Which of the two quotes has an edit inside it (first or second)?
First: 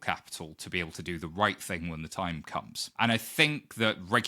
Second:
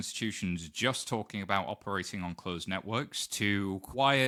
first